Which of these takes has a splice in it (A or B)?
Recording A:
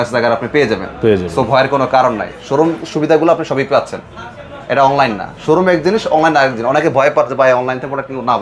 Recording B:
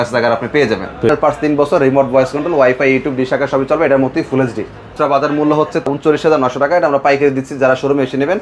B